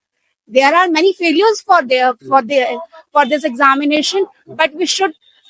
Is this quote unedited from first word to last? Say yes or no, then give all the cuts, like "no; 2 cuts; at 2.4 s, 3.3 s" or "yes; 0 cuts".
yes; 0 cuts